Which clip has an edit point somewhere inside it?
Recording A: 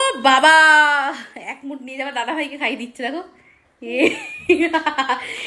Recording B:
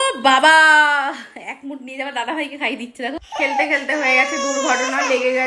B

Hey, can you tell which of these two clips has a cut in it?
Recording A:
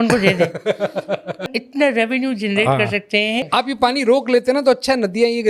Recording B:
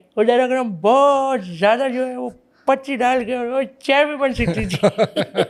A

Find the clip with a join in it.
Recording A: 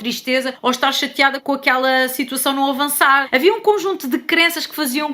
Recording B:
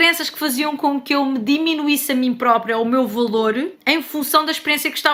A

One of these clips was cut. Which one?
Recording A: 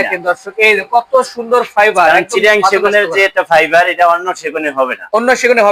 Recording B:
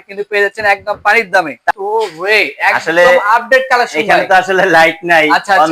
B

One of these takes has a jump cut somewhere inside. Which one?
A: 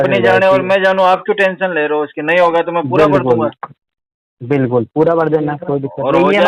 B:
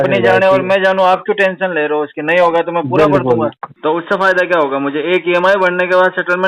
B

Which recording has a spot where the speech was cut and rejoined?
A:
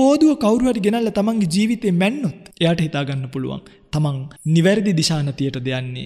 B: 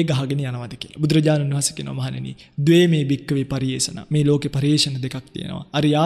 A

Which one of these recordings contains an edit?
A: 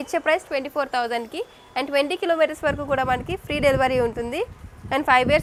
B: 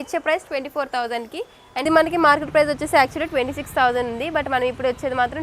B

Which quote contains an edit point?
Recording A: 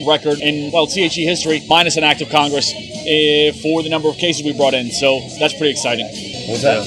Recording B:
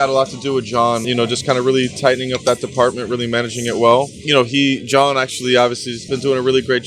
B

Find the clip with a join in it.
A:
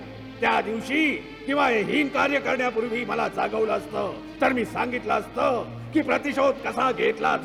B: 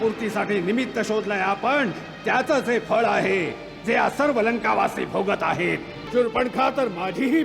B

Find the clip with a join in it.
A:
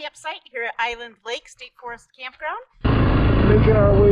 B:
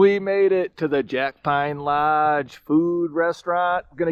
A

